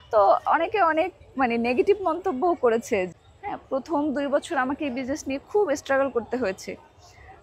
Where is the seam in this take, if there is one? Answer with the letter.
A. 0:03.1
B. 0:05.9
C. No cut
A